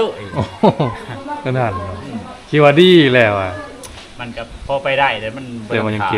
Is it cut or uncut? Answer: uncut